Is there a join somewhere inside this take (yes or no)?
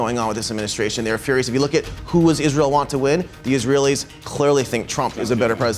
no